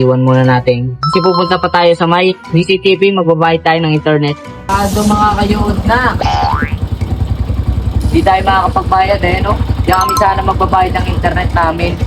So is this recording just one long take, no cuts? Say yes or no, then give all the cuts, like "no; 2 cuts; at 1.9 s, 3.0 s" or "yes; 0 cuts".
no; 1 cut; at 4.6 s